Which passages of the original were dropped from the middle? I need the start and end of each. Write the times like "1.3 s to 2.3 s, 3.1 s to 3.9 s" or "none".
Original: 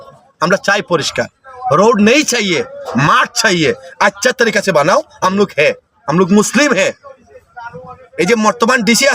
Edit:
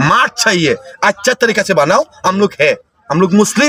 none